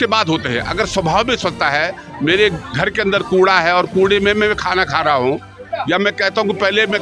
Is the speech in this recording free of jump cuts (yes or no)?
yes